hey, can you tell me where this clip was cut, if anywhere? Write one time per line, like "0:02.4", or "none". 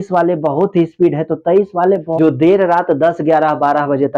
0:02.1